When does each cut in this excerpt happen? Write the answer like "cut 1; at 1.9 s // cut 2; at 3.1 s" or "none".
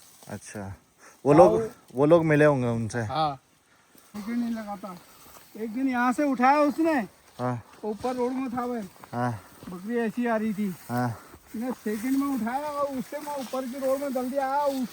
cut 1; at 4.1 s